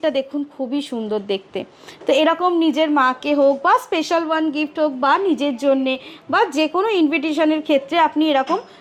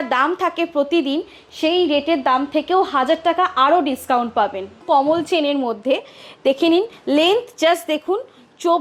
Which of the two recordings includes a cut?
second; 1 cut; at 4.8 s

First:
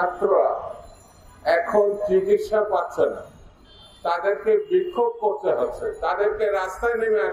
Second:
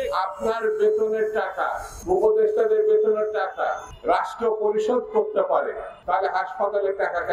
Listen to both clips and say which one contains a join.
second; 3 cuts; at 1.9 s, 3.9 s, 5.9 s

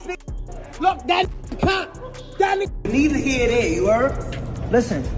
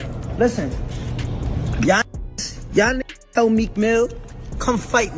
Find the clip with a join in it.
first; 1 cut; at 2.8 s

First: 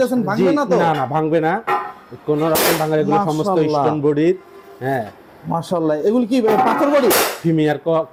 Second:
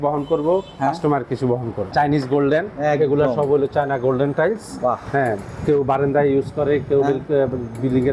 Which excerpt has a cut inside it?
second; 1 cut; at 1.9 s

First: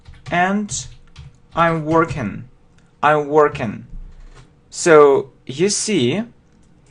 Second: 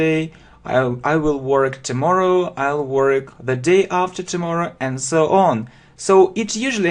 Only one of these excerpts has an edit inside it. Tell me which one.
first; 1 cut; at 5.4 s

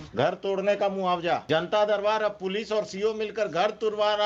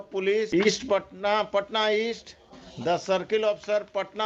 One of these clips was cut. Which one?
first; 1 cut; at 1.4 s

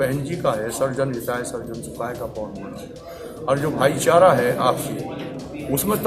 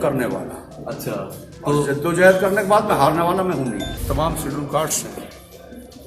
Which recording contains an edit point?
second; 1 cut; at 3.9 s

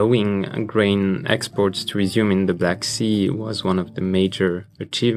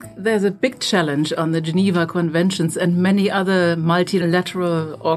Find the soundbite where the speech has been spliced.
second; 1 cut; at 4.2 s

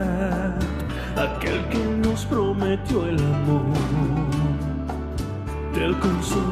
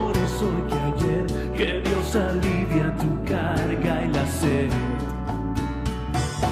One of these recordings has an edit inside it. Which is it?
second; 1 cut; at 2.5 s

